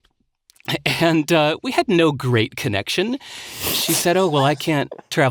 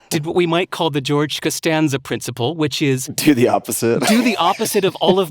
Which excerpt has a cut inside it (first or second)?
second